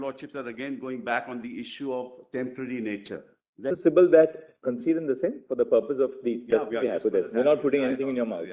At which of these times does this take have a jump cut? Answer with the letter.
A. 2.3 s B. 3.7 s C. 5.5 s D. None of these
B